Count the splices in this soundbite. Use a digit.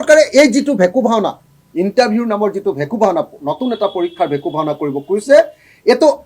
0